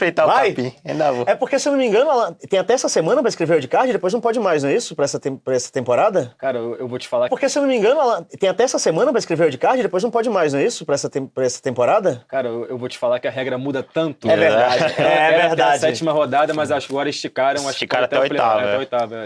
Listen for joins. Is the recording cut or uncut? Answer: uncut